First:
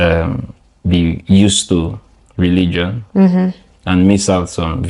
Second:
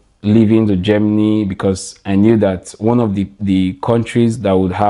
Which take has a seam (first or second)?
second